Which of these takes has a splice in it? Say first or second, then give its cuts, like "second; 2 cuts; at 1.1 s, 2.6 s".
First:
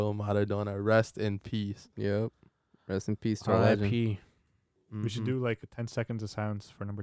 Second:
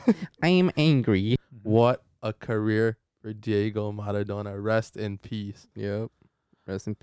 second; 1 cut; at 1.4 s